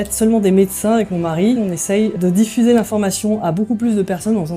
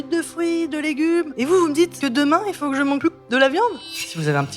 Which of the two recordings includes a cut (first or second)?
second